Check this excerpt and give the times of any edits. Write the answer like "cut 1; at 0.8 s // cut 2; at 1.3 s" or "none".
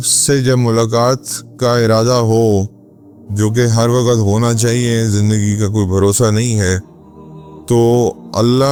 none